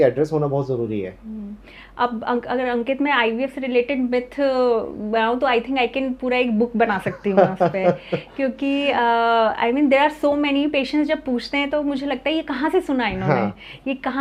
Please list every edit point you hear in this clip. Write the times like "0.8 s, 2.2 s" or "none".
none

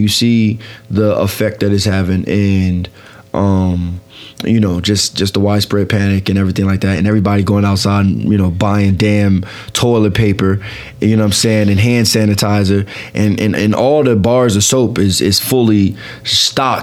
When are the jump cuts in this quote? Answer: none

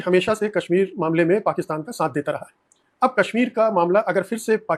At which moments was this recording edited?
none

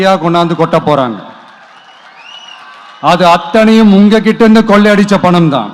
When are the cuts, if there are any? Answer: none

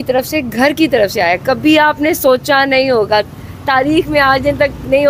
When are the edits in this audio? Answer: none

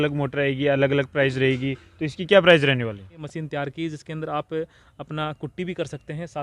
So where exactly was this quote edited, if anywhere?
3.2 s

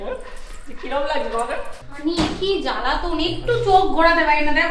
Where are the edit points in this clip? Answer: 1.8 s

